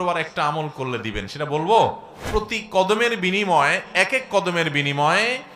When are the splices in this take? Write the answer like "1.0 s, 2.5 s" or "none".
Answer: 2.1 s